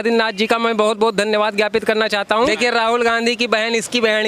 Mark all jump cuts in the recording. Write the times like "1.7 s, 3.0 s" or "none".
2.5 s